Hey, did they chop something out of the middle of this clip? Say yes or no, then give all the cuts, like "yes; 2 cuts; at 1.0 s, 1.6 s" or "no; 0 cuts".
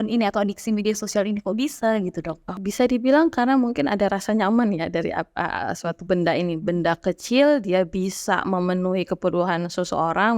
yes; 1 cut; at 2.6 s